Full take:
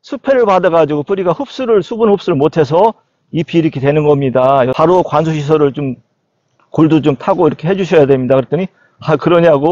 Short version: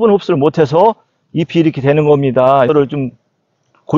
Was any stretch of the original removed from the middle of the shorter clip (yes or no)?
yes